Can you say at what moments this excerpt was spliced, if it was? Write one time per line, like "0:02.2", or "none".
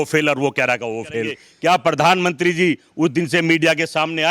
0:01.4